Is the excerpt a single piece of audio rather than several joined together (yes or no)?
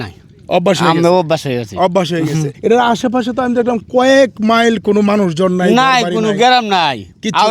no